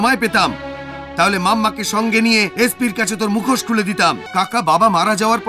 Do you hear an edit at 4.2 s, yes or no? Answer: yes